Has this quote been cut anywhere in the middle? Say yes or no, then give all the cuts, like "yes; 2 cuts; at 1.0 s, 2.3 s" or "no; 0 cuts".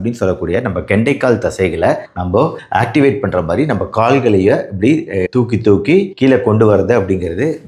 no; 0 cuts